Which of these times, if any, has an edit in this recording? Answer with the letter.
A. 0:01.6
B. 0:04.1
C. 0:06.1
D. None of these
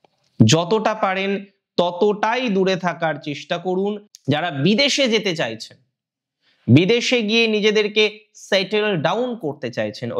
B